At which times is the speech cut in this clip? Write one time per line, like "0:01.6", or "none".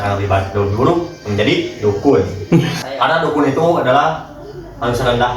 0:02.8